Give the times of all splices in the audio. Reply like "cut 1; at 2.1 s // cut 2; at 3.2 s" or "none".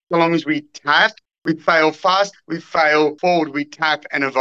cut 1; at 3.2 s